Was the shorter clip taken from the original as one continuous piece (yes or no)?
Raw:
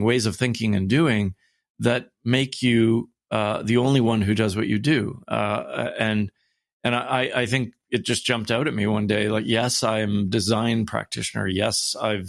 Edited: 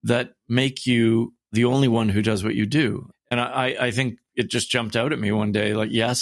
no